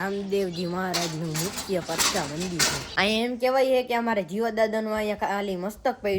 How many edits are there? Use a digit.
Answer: 1